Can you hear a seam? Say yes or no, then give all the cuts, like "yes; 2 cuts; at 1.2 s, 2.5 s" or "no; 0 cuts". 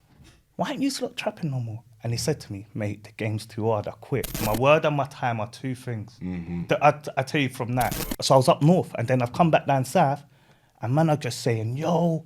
yes; 2 cuts; at 4.4 s, 8.1 s